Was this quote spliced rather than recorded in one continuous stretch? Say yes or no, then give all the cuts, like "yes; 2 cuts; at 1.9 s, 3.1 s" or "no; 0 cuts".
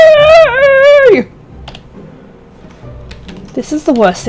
no; 0 cuts